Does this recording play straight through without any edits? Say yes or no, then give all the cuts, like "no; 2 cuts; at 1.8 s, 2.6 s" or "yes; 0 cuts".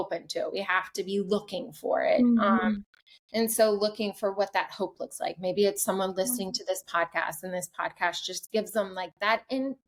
yes; 0 cuts